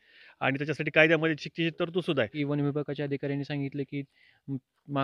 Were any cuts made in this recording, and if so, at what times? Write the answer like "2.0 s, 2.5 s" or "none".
2.3 s